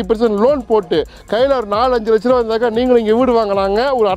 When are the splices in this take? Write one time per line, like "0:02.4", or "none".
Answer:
none